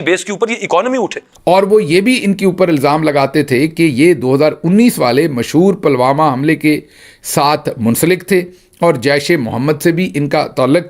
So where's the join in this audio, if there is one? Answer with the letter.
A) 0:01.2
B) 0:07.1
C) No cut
A